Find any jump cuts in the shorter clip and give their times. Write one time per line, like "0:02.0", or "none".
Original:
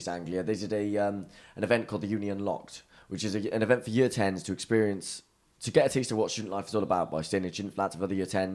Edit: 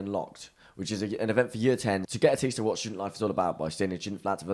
0:02.1